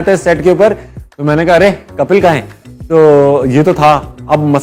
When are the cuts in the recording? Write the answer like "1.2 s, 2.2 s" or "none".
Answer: none